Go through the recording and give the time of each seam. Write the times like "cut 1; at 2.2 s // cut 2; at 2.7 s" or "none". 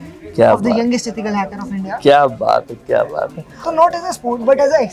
cut 1; at 3.6 s